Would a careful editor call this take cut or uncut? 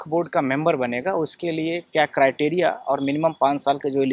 uncut